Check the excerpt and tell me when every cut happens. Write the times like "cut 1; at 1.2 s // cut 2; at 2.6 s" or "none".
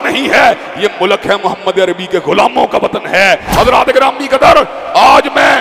cut 1; at 3.5 s